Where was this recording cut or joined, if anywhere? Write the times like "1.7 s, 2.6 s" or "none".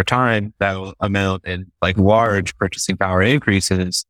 none